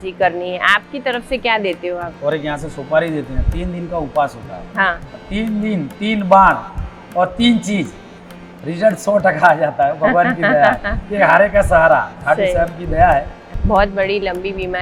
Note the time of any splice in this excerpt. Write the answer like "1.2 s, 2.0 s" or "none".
2.1 s, 5.2 s, 13.5 s